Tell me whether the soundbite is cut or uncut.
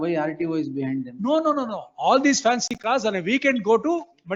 uncut